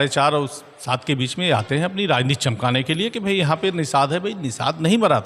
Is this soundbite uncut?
yes; 0 cuts

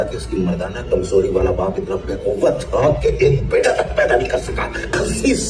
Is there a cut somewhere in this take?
no; 0 cuts

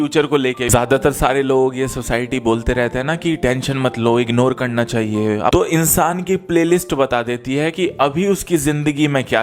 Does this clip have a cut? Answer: yes; 2 cuts; at 0.7 s, 5.5 s

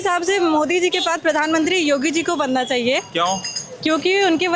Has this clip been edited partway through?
no; 0 cuts

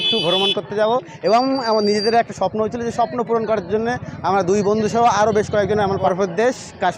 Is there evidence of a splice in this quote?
yes; 1 cut; at 6.1 s

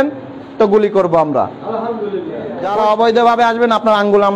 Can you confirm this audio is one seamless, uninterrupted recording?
no; 1 cut; at 2.7 s

